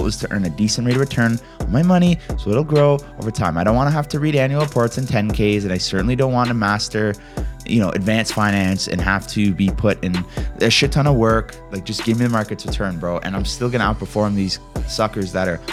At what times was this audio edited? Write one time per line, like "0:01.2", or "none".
0:14.8